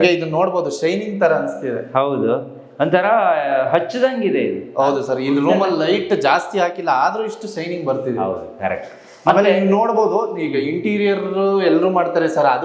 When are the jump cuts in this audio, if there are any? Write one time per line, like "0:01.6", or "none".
none